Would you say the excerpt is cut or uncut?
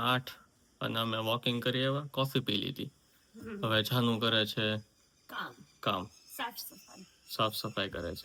uncut